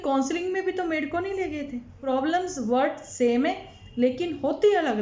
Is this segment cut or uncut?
cut